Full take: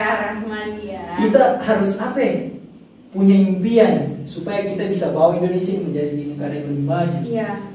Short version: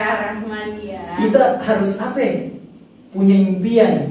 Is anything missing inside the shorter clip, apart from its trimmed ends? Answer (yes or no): no